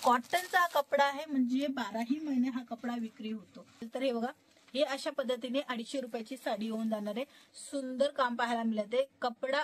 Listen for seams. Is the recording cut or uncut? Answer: cut